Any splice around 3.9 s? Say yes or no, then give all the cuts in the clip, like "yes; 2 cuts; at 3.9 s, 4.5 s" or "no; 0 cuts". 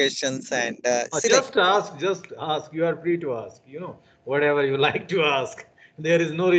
no; 0 cuts